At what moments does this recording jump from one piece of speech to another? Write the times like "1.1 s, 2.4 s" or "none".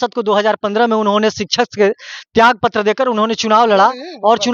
none